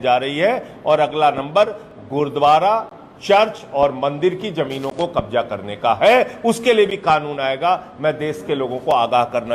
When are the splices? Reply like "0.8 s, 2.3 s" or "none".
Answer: none